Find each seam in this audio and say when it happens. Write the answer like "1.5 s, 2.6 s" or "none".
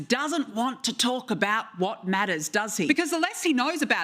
2.9 s